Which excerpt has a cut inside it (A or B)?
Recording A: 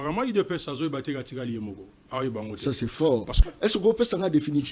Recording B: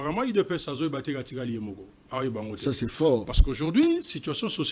A